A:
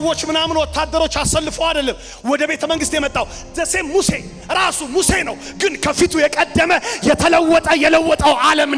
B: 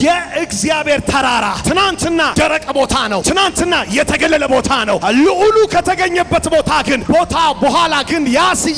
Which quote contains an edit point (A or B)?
B